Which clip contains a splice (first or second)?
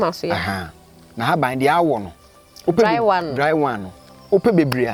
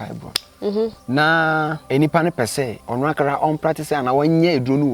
second